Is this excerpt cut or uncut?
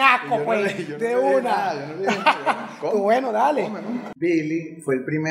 cut